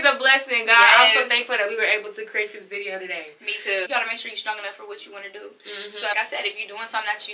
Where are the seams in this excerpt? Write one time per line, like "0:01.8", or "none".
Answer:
0:03.9
0:06.1